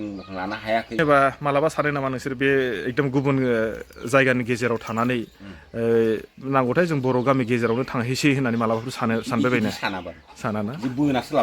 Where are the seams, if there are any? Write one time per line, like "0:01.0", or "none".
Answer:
0:01.0